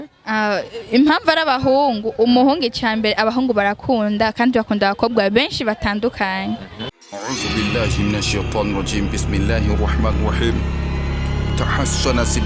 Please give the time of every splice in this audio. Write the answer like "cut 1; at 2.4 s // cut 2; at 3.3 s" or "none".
cut 1; at 7.1 s